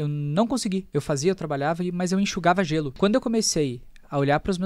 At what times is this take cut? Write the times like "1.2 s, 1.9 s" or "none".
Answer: 0.9 s, 2.9 s